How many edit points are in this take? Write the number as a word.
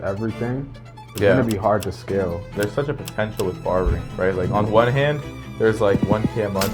one